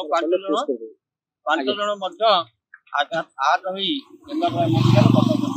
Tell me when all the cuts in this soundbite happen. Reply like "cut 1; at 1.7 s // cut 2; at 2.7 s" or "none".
none